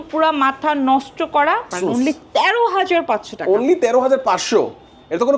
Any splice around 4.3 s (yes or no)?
no